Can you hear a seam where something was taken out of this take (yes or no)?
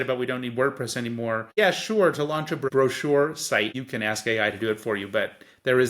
yes